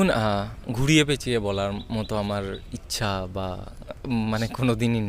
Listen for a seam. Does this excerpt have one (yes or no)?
no